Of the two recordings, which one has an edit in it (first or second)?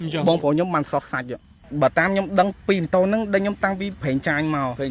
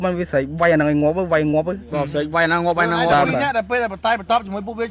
first